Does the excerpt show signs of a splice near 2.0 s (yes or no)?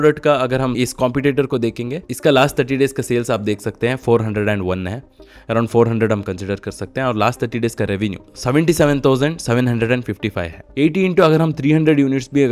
yes